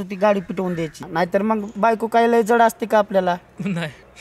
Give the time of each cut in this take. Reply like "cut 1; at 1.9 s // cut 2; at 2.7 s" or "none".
cut 1; at 1.0 s